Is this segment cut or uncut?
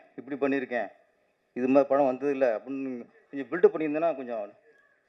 uncut